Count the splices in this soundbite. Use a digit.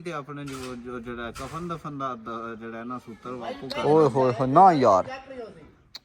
0